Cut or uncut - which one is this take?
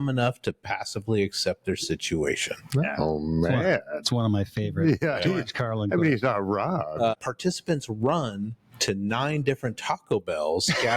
cut